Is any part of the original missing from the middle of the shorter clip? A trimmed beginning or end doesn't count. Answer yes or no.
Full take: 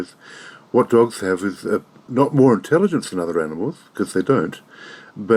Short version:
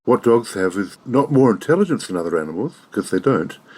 yes